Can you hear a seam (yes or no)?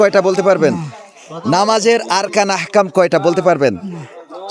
no